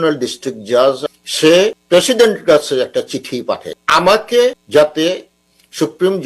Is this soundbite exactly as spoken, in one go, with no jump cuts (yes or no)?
no